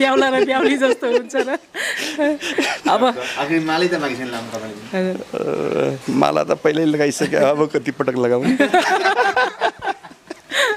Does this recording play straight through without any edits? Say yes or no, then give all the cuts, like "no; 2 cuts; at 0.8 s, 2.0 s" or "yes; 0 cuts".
yes; 0 cuts